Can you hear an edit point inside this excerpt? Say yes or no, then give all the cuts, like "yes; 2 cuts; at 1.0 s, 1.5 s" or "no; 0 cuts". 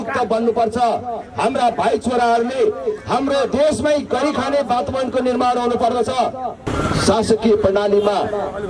yes; 1 cut; at 6.7 s